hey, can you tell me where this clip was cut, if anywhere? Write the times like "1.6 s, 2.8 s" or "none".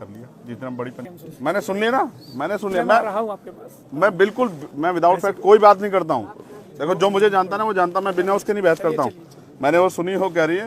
1.0 s